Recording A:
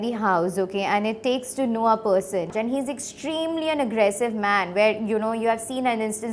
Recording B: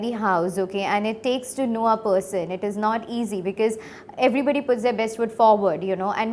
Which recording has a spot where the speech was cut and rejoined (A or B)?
A